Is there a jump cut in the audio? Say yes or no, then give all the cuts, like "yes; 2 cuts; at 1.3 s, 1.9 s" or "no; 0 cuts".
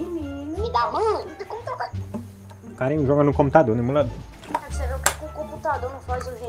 yes; 1 cut; at 1.4 s